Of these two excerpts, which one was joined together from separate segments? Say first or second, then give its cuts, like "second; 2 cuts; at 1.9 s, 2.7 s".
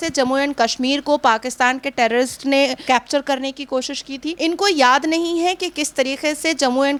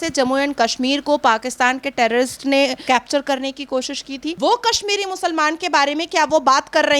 second; 1 cut; at 4.4 s